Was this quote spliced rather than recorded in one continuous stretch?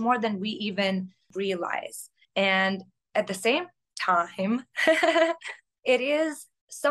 yes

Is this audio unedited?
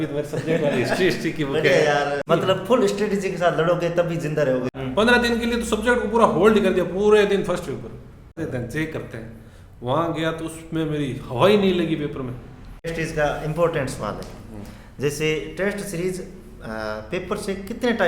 no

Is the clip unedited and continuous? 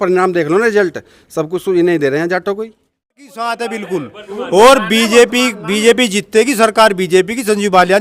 no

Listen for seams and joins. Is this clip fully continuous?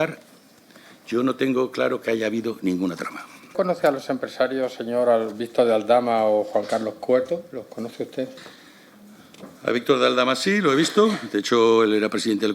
no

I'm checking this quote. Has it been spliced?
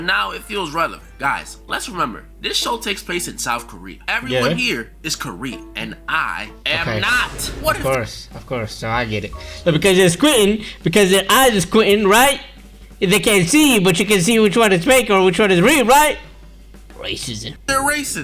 no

